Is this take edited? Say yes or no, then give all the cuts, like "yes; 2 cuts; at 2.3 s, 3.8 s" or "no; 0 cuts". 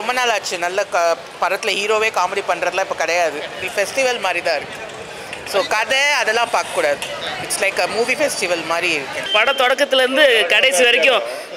yes; 2 cuts; at 3.6 s, 9.3 s